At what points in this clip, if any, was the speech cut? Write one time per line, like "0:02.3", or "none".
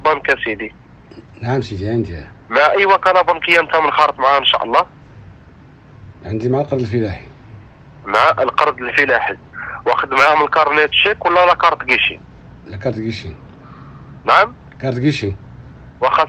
none